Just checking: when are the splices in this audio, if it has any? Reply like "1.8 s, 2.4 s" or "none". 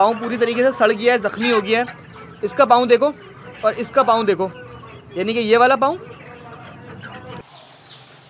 7.4 s